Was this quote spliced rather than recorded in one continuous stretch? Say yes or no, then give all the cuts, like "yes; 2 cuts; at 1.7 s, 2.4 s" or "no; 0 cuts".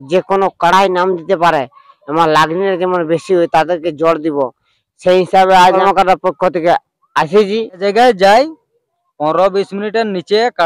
yes; 2 cuts; at 5.8 s, 7.8 s